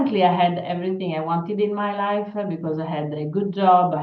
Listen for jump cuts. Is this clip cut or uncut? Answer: uncut